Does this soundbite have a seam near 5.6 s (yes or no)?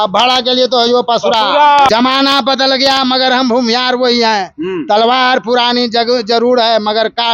no